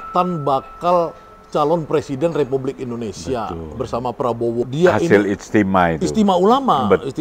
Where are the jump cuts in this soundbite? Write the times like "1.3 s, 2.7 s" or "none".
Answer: 4.6 s